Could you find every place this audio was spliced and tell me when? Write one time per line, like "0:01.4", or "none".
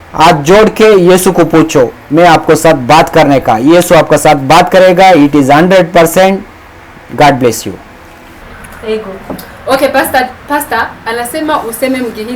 0:08.3